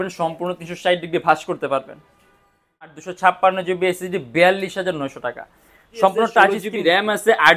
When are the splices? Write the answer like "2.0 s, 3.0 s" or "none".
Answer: 2.9 s, 6.7 s